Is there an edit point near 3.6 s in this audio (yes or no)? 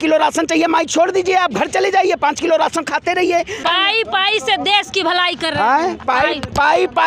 yes